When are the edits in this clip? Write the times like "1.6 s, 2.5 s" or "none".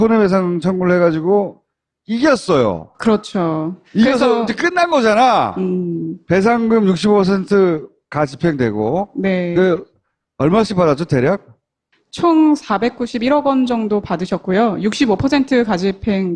1.9 s